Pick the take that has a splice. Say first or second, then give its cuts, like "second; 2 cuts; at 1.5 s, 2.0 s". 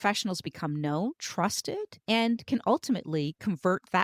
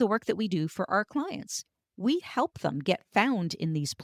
first; 1 cut; at 1.5 s